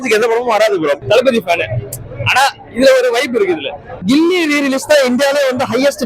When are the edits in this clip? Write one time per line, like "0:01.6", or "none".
0:01.0
0:04.0